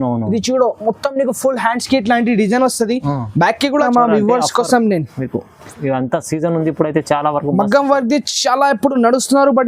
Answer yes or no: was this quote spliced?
yes